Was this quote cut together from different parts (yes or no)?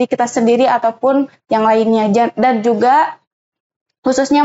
no